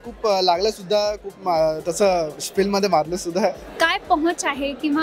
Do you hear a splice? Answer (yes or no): yes